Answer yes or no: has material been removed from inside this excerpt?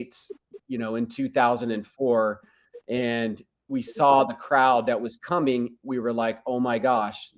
no